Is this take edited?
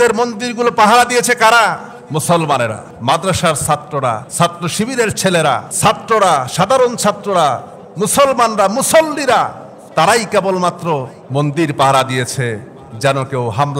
yes; 5 cuts; at 1.9 s, 2.9 s, 4.3 s, 5.7 s, 11.2 s

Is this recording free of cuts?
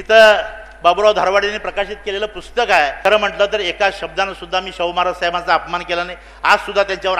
no; 1 cut; at 3.0 s

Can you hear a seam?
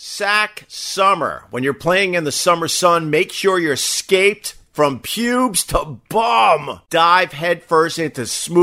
yes; 1 cut; at 6.7 s

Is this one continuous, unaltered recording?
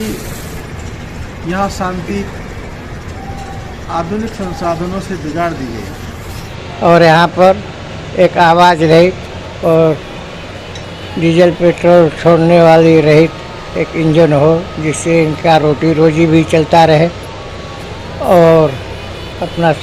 no; 1 cut; at 6.5 s

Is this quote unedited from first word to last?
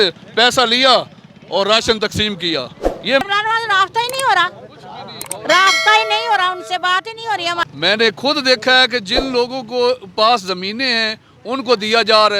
no; 2 cuts; at 3.2 s, 7.6 s

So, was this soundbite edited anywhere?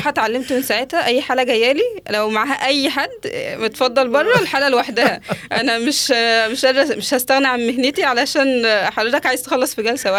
no; 0 cuts

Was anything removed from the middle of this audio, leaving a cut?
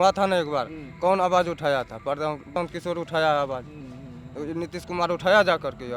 yes; 1 cut; at 2.5 s

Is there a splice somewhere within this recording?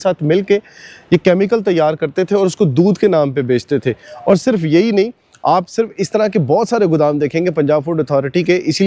no; 0 cuts

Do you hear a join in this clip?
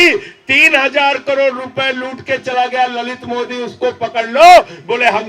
no; 0 cuts

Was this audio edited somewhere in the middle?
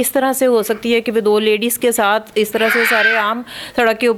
no; 0 cuts

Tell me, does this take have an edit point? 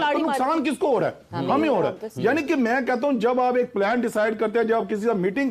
no; 0 cuts

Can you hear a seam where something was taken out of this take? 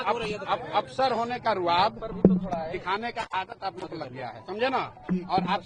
no; 0 cuts

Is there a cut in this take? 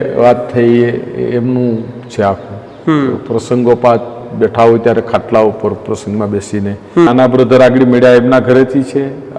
yes; 1 cut; at 7.1 s

